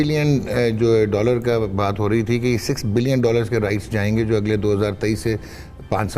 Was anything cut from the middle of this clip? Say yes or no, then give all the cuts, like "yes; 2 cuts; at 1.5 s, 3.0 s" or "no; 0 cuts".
no; 0 cuts